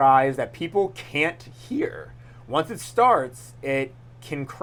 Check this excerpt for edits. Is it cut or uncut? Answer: uncut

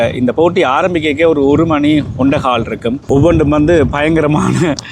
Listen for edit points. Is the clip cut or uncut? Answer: cut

